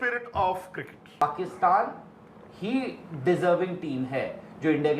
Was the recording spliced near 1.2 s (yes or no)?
yes